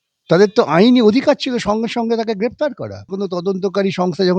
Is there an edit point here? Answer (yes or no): yes